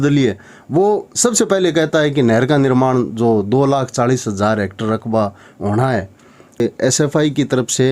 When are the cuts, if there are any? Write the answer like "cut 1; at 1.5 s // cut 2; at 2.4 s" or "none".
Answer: cut 1; at 6.6 s